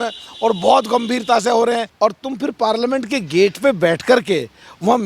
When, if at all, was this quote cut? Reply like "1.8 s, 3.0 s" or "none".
1.9 s